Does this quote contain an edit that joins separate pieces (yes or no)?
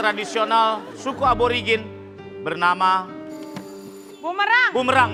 no